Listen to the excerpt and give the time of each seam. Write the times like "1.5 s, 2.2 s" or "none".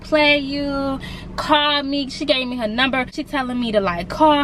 3.2 s